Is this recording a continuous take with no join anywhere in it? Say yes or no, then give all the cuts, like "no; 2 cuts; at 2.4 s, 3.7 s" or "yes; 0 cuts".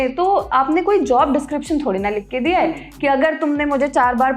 yes; 0 cuts